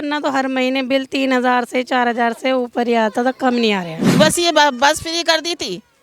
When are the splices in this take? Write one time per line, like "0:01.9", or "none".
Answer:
0:04.0